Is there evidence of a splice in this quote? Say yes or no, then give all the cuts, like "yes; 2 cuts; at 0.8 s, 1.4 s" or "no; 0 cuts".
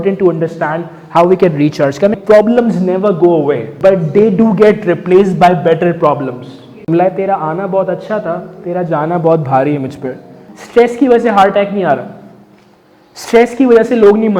yes; 4 cuts; at 2.2 s, 3.7 s, 6.9 s, 10.5 s